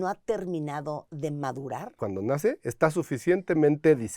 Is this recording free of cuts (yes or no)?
no